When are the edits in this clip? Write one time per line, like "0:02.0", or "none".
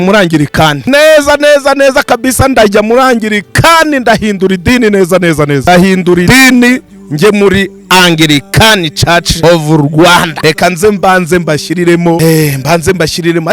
0:00.8
0:05.6
0:06.2
0:09.4
0:10.3
0:12.2